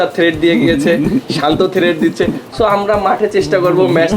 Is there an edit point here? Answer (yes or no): yes